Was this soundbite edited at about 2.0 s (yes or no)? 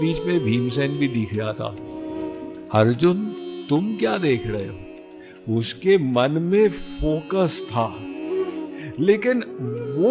yes